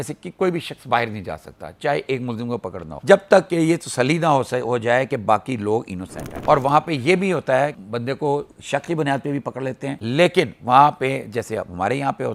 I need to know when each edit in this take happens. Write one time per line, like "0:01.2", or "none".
none